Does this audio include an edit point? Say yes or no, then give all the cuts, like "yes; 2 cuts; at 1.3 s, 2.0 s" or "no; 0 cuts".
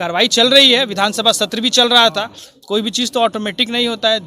no; 0 cuts